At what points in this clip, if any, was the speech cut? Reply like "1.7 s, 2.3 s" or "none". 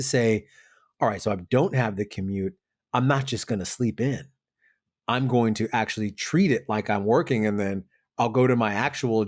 none